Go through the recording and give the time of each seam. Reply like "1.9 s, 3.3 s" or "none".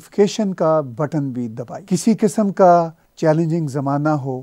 none